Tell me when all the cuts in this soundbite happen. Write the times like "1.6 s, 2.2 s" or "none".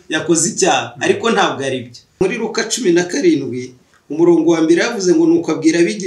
2.2 s